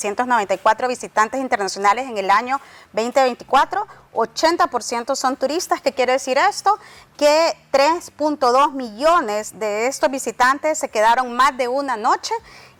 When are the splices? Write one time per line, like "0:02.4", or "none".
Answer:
none